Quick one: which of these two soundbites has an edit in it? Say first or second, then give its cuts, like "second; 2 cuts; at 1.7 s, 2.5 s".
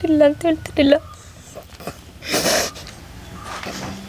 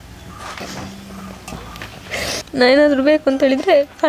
second; 1 cut; at 2.5 s